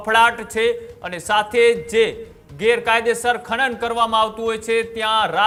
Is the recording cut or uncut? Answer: uncut